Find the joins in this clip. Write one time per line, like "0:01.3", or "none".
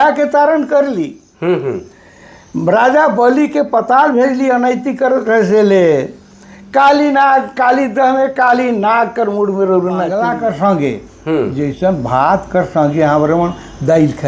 0:10.2